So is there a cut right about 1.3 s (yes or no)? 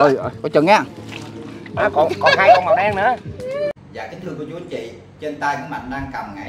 no